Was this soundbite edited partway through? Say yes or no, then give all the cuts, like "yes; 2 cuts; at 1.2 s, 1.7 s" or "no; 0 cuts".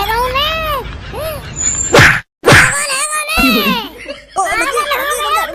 no; 0 cuts